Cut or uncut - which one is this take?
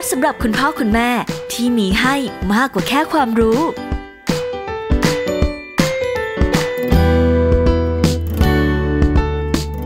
uncut